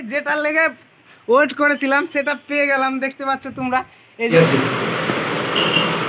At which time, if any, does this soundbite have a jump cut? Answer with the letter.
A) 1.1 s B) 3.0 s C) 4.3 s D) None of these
C